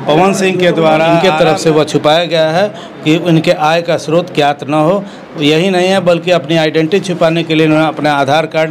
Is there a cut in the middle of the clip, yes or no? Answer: yes